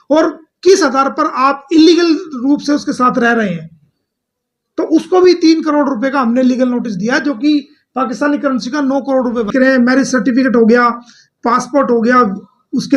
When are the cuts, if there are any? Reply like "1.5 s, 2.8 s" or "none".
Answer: 9.5 s